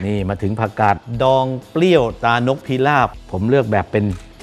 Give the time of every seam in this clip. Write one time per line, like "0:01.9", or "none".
none